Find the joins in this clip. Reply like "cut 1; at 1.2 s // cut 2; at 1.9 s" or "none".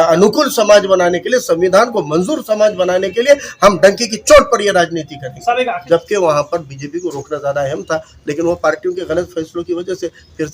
cut 1; at 5.8 s